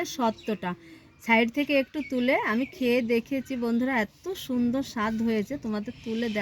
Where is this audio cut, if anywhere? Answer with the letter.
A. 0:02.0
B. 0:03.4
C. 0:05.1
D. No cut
D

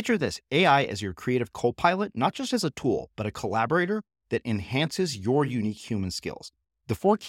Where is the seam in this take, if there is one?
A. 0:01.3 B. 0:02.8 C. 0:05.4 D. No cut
D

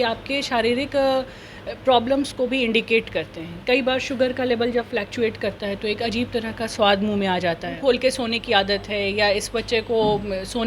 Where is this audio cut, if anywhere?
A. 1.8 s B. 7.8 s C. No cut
B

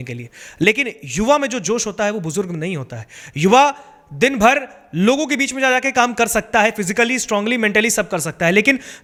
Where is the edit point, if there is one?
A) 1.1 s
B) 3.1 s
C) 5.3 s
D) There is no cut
D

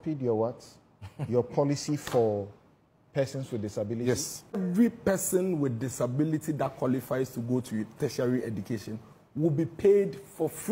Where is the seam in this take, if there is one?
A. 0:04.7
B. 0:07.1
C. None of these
A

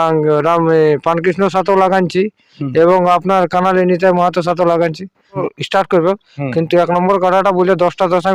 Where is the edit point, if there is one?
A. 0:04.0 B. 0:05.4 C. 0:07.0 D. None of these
B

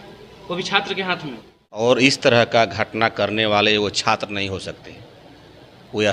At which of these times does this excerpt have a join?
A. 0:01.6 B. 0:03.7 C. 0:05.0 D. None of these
A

